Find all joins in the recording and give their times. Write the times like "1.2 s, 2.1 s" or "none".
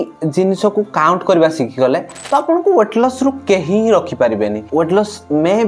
4.7 s